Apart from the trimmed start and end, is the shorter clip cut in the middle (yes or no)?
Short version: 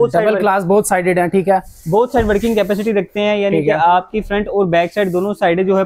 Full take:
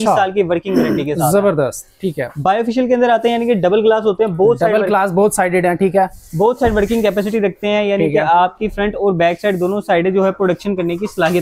no